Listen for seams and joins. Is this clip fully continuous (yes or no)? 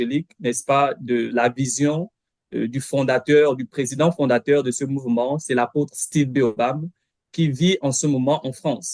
yes